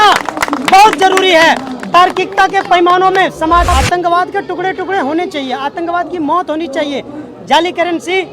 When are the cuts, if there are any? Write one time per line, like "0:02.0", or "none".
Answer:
0:03.7